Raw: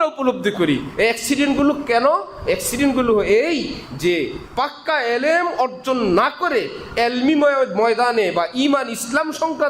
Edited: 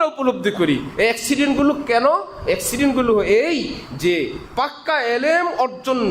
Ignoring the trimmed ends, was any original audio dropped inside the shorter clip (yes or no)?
no